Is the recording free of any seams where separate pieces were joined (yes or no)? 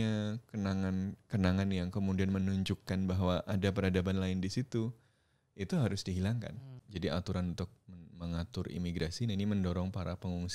no